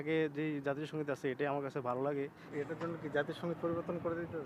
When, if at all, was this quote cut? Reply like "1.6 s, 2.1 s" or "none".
2.4 s